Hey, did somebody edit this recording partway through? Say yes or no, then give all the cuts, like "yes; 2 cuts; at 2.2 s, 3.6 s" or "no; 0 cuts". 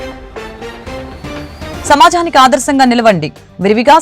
yes; 1 cut; at 1.7 s